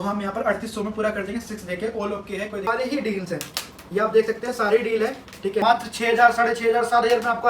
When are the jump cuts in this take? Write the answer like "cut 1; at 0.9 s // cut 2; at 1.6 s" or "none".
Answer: cut 1; at 2.7 s // cut 2; at 5.6 s